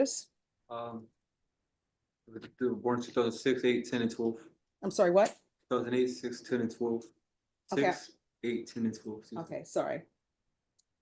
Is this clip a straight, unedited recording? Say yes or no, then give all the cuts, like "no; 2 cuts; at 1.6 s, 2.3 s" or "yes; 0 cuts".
yes; 0 cuts